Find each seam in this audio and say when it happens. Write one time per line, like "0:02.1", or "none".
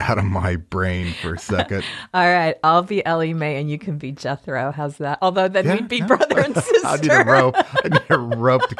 none